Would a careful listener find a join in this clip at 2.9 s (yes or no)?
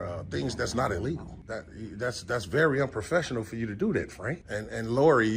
no